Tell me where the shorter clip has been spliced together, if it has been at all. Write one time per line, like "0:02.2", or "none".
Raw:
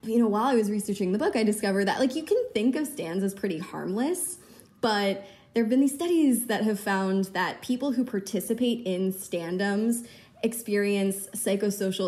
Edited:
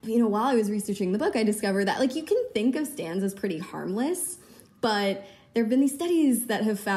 none